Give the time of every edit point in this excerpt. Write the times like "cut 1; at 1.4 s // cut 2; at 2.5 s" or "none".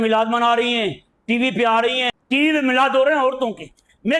cut 1; at 2.1 s